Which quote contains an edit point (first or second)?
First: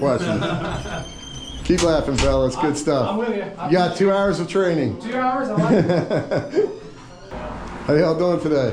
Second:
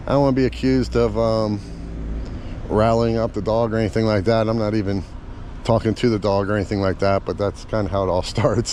first